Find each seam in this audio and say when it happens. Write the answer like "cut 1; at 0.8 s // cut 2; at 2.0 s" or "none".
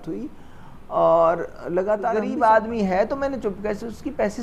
cut 1; at 2.2 s